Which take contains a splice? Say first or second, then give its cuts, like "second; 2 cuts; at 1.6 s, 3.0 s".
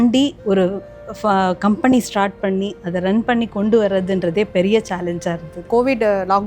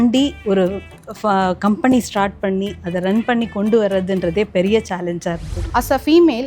second; 1 cut; at 5.6 s